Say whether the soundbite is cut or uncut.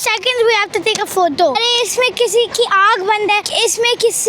cut